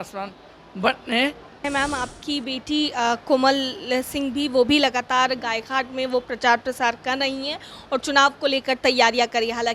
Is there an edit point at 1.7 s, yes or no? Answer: yes